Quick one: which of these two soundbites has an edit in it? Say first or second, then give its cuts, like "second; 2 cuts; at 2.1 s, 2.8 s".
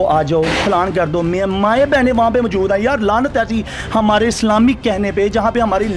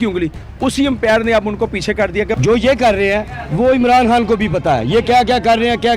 second; 1 cut; at 2.3 s